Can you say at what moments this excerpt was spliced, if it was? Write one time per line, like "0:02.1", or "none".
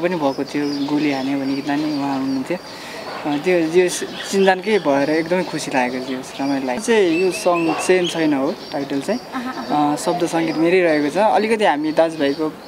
0:06.8